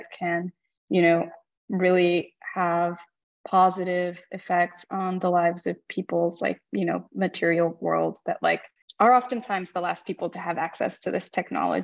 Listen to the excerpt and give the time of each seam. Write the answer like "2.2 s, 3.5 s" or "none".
none